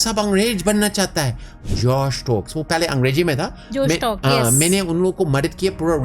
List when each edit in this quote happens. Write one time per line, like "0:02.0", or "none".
0:01.6